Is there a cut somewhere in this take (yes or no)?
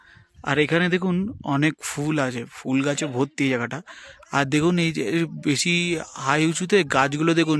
no